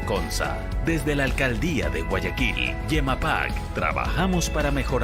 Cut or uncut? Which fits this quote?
uncut